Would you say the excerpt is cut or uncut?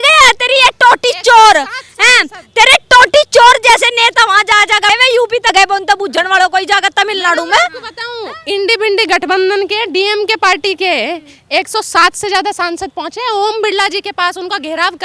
uncut